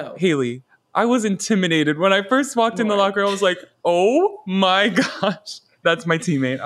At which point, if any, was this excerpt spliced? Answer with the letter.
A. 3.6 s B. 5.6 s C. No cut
B